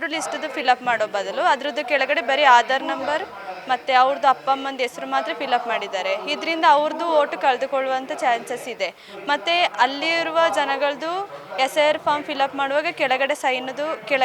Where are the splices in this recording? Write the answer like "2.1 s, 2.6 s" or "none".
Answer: none